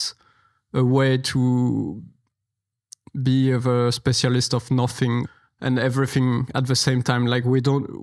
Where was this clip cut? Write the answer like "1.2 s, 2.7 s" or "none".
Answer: 5.3 s